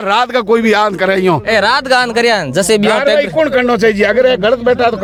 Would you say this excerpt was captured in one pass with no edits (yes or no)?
yes